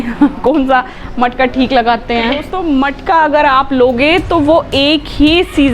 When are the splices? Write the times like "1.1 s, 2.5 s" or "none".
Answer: 2.5 s